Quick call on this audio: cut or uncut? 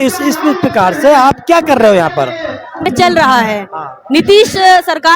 cut